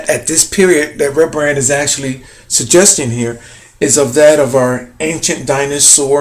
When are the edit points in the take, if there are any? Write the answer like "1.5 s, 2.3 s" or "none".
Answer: none